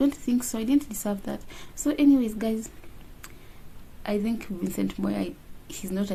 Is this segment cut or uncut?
uncut